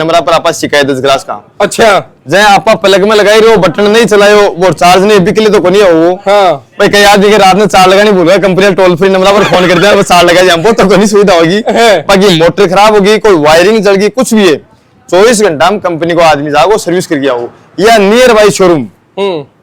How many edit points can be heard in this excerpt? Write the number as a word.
zero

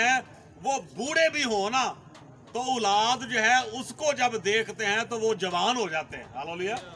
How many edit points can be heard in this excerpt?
zero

